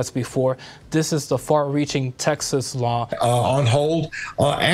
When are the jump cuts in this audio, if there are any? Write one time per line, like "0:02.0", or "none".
0:03.1